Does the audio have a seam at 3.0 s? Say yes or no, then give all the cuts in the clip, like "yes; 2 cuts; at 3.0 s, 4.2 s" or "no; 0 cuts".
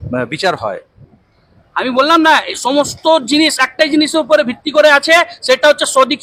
no; 1 cut; at 1.0 s